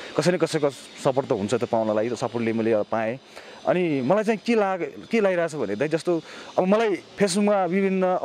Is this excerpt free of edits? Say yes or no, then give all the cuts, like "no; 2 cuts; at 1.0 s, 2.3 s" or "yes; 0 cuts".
yes; 0 cuts